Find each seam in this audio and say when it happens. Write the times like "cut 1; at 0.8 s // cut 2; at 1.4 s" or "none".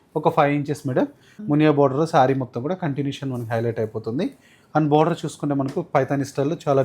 cut 1; at 1.4 s